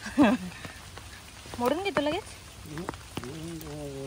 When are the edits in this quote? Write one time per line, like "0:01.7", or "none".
0:01.4